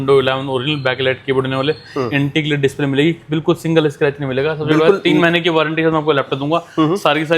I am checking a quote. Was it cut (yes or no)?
no